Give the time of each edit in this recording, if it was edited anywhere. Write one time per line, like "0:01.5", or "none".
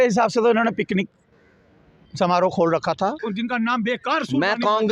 0:03.2